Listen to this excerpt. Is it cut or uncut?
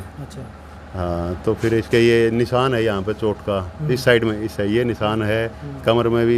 uncut